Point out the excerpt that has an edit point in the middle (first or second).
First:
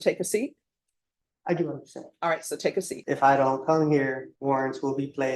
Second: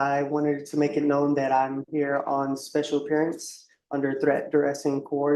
first